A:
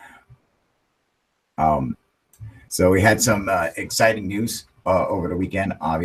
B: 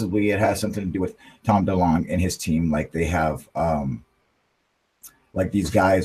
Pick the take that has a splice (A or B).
A